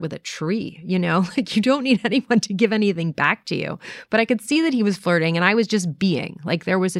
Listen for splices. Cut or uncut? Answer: uncut